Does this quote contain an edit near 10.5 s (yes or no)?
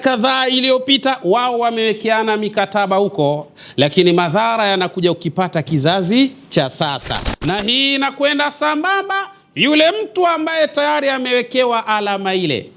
no